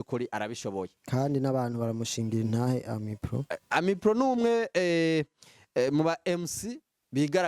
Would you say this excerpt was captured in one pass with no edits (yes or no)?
yes